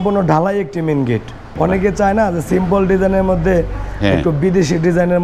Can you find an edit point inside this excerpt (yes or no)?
yes